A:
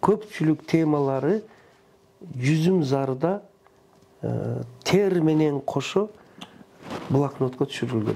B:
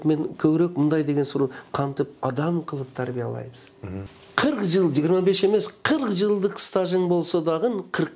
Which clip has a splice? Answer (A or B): B